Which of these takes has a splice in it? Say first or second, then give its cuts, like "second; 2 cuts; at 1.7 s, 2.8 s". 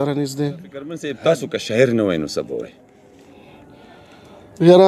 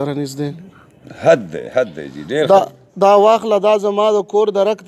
first; 1 cut; at 1.1 s